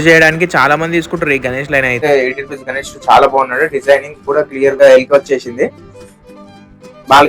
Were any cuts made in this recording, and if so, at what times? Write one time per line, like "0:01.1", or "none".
0:02.0
0:04.8